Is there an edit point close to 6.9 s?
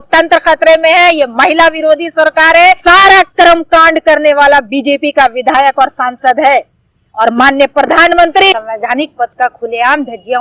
no; 2 cuts; at 2.8 s, 8.5 s

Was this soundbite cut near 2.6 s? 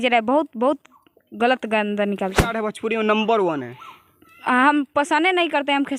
yes; 1 cut; at 2.6 s

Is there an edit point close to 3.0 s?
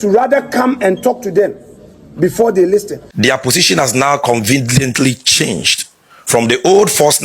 yes; 1 cut; at 3.0 s

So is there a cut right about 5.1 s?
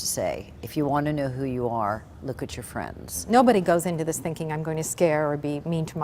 no; 1 cut; at 3.2 s

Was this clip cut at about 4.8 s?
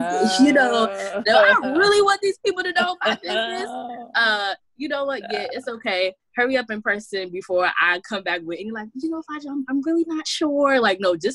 no; 0 cuts

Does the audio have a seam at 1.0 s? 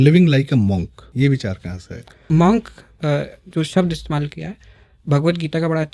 yes; 2 cuts; at 1.0 s, 2.2 s

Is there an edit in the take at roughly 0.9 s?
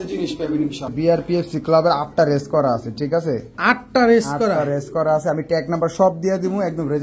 yes; 1 cut; at 0.9 s

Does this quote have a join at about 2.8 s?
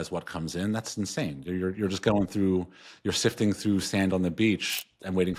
no; 0 cuts

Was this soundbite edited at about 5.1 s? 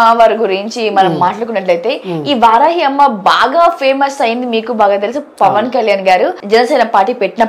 no; 1 cut; at 6.4 s

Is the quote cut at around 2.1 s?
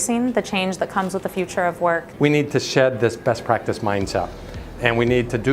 yes; 1 cut; at 2.1 s

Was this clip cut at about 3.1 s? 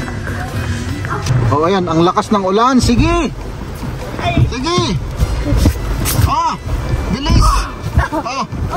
no; 1 cut; at 1.3 s

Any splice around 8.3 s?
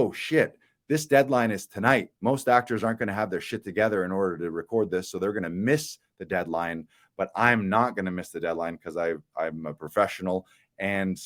no; 0 cuts

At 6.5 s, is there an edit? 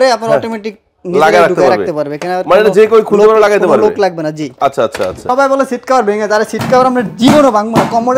no; 1 cut; at 5.3 s

